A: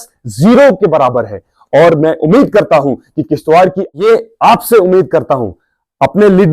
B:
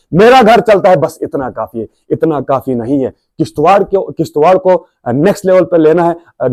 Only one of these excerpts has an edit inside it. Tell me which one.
A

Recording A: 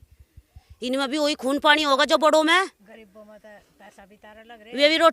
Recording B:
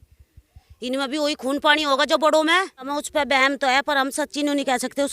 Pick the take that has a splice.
B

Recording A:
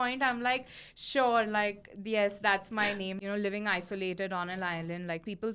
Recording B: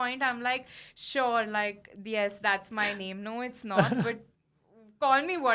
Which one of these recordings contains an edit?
A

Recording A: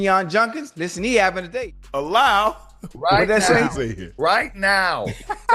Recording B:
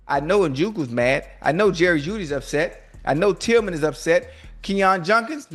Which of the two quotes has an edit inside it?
A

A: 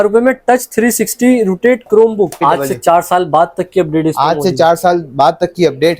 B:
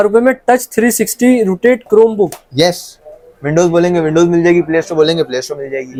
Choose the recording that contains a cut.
A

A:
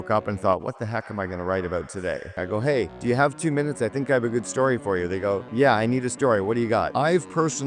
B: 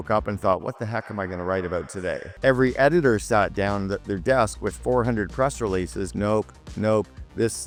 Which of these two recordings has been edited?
A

